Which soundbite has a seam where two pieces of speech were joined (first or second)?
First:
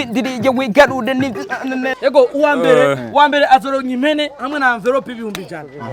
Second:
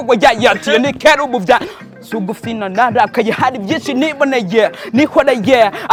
first